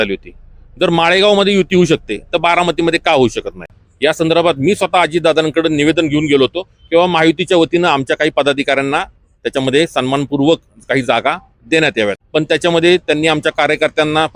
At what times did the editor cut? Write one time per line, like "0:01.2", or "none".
0:03.8
0:12.2